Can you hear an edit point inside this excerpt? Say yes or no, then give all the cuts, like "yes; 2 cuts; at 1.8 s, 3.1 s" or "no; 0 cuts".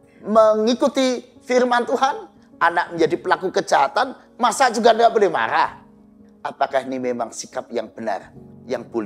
yes; 1 cut; at 6.2 s